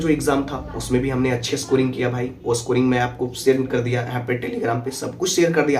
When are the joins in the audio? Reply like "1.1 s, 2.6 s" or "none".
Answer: none